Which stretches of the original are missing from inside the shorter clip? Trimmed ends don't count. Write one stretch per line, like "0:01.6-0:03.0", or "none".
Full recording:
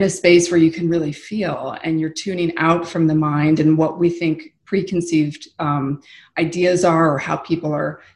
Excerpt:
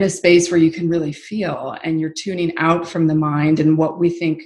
none